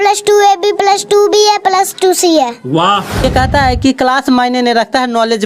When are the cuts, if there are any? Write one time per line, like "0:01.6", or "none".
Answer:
0:03.2